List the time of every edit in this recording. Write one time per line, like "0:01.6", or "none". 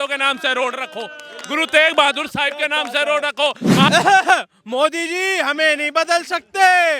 0:03.9